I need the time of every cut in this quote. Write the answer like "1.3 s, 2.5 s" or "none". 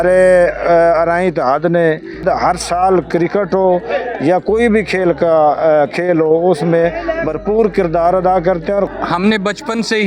2.2 s, 8.9 s